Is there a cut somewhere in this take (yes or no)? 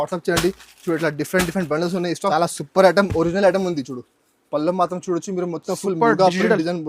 yes